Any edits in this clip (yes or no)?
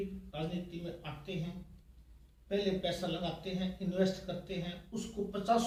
no